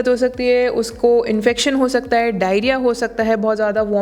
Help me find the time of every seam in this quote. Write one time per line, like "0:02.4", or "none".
none